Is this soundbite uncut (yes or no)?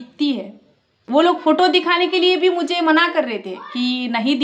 no